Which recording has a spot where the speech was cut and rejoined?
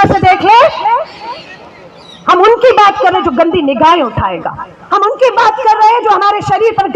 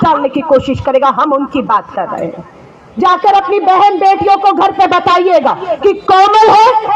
second; 1 cut; at 2.9 s

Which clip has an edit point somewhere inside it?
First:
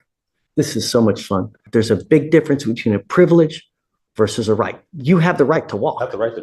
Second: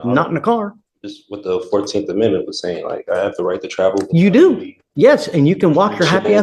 first; 1 cut; at 1.6 s

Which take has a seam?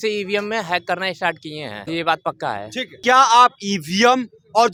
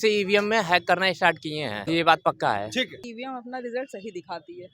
second; 1 cut; at 2.9 s

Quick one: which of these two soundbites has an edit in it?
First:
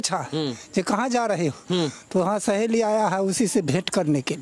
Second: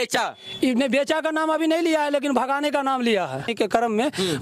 second; 1 cut; at 3.4 s

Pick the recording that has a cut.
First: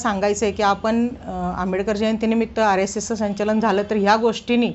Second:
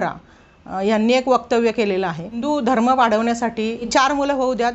second; 2 cuts; at 2.4 s, 3.9 s

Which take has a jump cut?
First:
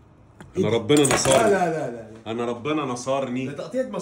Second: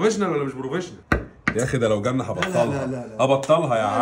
second; 1 cut; at 1.0 s

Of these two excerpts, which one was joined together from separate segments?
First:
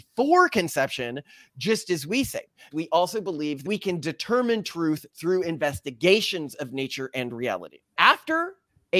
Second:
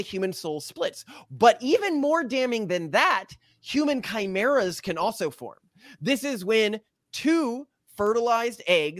first; 3 cuts; at 2.6 s, 3.6 s, 7.9 s

